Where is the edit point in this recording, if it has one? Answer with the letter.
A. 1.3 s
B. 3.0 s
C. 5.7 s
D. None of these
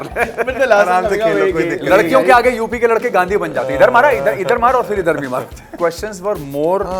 C